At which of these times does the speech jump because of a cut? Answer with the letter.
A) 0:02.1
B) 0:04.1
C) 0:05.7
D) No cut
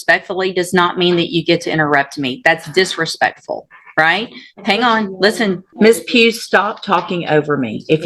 C